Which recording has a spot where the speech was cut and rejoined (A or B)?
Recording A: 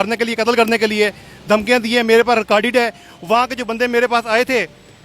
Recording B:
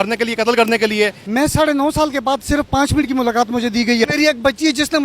B